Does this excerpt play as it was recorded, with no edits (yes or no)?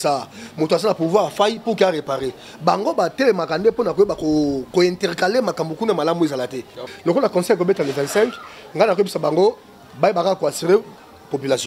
no